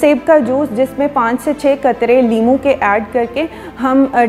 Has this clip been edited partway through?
no; 0 cuts

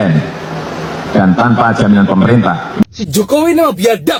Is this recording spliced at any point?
no; 0 cuts

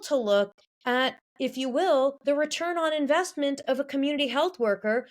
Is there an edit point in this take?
yes; 1 cut; at 2.2 s

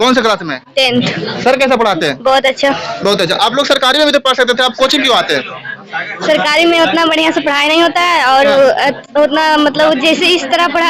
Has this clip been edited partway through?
no; 0 cuts

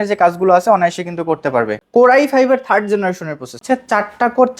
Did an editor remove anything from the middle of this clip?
yes; 2 cuts; at 1.8 s, 3.6 s

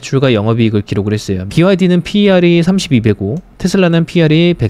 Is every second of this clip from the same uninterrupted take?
no; 1 cut; at 1.4 s

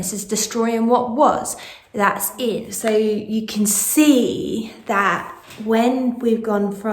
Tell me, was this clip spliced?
yes; 1 cut; at 2.7 s

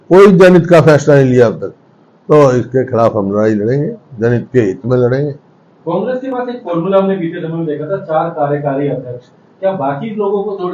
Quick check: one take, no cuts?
yes; 0 cuts

